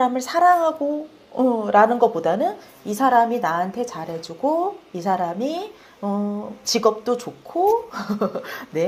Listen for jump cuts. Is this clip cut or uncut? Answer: uncut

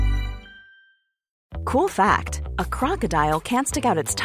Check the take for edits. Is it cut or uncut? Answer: cut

